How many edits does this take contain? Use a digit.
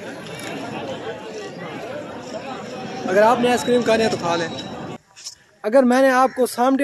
1